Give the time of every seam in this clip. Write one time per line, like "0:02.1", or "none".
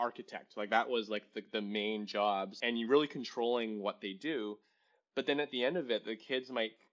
0:02.6